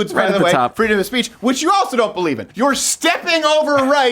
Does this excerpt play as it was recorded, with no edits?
no; 1 cut; at 2.5 s

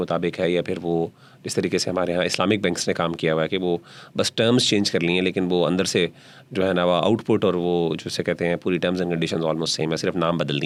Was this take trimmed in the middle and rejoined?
no; 0 cuts

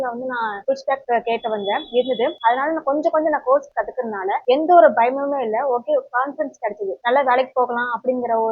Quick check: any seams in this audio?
no; 0 cuts

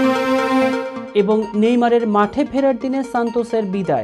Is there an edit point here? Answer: yes; 1 cut; at 1.0 s

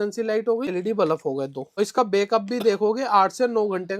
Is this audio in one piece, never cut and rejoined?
no; 2 cuts; at 0.7 s, 1.7 s

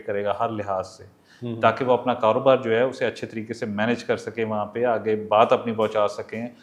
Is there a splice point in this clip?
no; 0 cuts

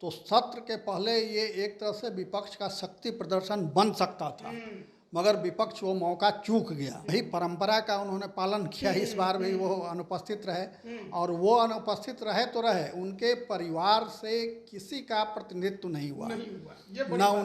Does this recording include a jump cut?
yes; 1 cut; at 7.1 s

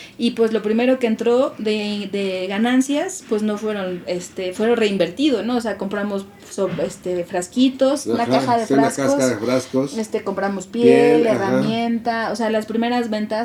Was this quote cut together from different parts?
no; 0 cuts

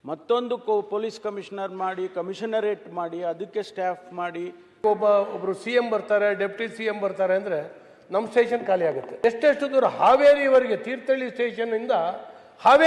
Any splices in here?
yes; 2 cuts; at 4.6 s, 9.1 s

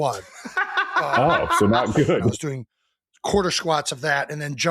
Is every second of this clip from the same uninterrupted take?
no; 1 cut; at 2.3 s

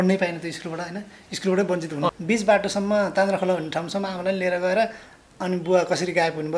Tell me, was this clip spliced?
yes; 1 cut; at 2.1 s

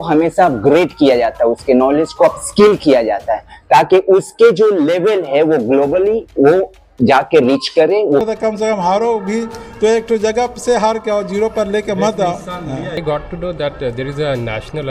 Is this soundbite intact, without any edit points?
no; 2 cuts; at 8.3 s, 13.0 s

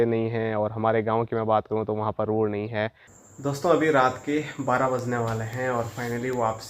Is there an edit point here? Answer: yes; 1 cut; at 3.1 s

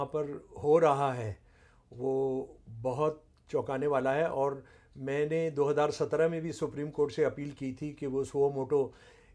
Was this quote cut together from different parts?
no; 0 cuts

